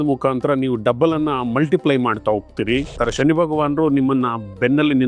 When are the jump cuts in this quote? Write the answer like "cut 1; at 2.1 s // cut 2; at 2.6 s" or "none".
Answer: cut 1; at 2.9 s